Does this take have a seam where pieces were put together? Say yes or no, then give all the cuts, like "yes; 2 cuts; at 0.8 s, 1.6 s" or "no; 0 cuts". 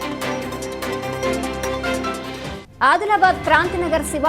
yes; 2 cuts; at 1.1 s, 2.1 s